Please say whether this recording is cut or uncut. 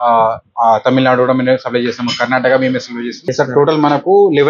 cut